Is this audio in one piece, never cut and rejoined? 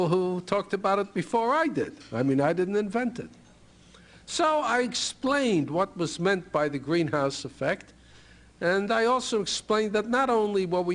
no; 1 cut; at 1.7 s

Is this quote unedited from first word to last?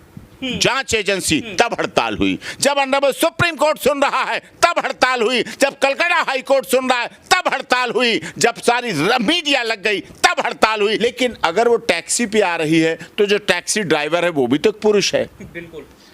no; 1 cut; at 11.0 s

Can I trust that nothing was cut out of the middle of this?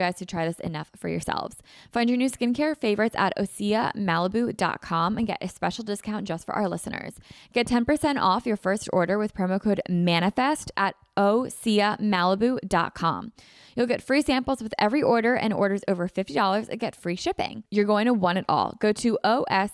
yes; 0 cuts

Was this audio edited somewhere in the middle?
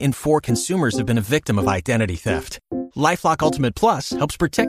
no; 0 cuts

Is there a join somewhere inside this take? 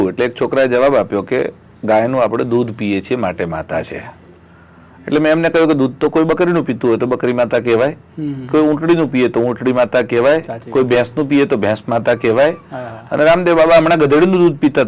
no; 0 cuts

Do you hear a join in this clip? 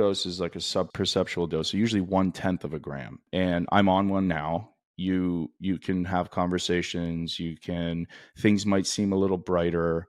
yes; 2 cuts; at 0.9 s, 3.3 s

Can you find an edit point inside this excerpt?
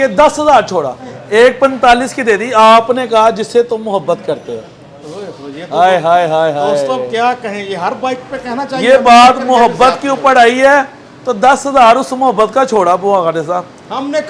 yes; 1 cut; at 1.1 s

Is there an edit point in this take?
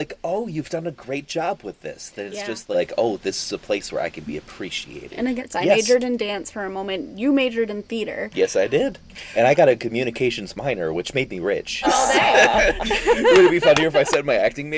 yes; 4 cuts; at 2.7 s, 5.4 s, 9.1 s, 11.8 s

